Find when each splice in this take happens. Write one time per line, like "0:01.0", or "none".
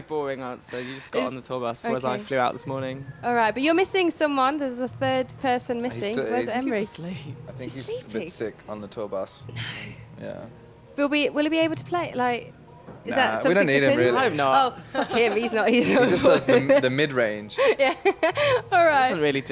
0:10.7